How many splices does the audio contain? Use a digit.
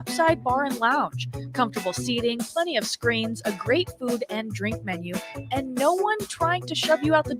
0